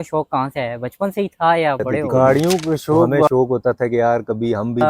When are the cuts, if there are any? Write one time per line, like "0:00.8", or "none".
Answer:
0:03.3